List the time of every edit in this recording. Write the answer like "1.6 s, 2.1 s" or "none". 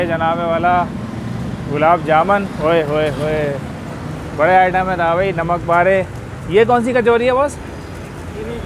2.5 s